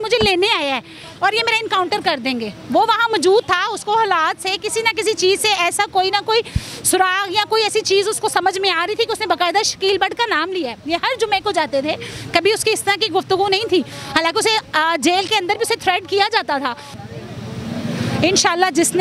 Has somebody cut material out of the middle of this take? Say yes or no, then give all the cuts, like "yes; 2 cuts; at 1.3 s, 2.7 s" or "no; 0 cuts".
yes; 1 cut; at 16.9 s